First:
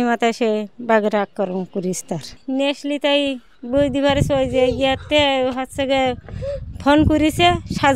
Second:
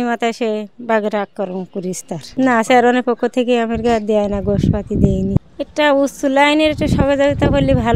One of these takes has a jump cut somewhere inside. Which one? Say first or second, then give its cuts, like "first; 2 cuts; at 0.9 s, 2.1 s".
second; 2 cuts; at 2.2 s, 5.4 s